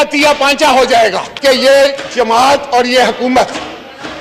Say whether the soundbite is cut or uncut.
cut